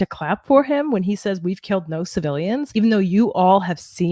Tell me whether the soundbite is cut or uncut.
cut